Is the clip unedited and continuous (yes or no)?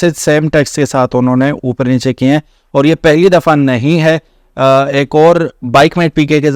yes